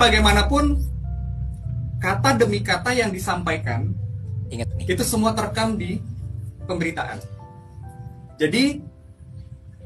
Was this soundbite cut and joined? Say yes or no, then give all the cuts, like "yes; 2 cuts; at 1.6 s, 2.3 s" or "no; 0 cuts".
yes; 1 cut; at 7.6 s